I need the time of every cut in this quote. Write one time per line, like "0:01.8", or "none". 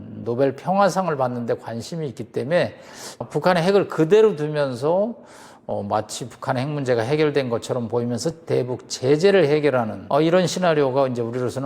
0:03.2
0:10.0

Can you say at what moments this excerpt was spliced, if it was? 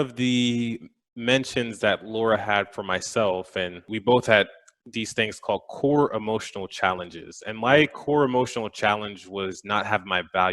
0:03.9

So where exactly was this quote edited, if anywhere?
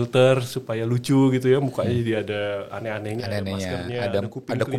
none

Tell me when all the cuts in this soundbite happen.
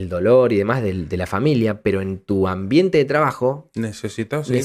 none

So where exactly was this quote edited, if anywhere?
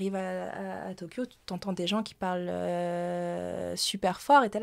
none

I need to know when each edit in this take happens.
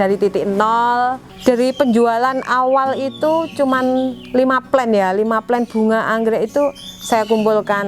0:01.3

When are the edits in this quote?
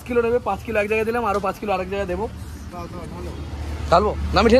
none

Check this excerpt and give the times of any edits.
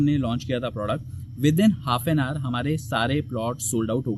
none

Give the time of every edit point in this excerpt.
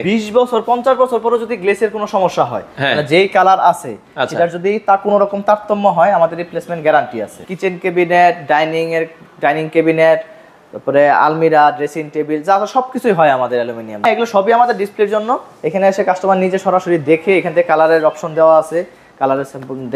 0:07.4
0:14.1

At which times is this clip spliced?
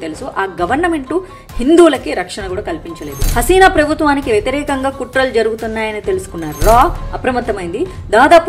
0:03.2

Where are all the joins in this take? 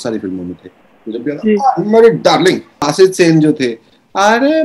0:02.8

